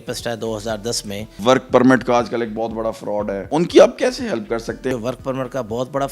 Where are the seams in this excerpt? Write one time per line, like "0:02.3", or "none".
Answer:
0:01.3
0:03.4
0:04.9